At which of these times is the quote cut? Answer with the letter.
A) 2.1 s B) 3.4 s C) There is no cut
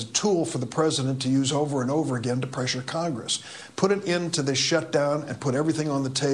C